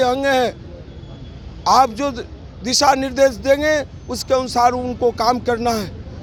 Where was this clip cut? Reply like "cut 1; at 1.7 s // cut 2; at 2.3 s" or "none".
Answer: none

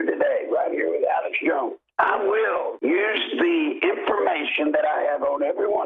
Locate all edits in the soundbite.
cut 1; at 1.8 s // cut 2; at 2.7 s

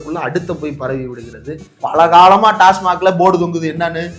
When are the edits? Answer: cut 1; at 1.8 s

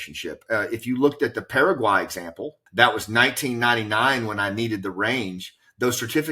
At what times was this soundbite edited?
cut 1; at 2.6 s

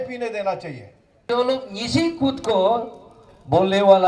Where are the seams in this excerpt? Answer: cut 1; at 1.2 s

